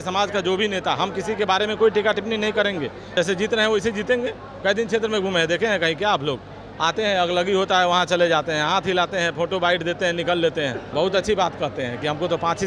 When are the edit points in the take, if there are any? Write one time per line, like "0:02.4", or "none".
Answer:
0:03.1
0:10.8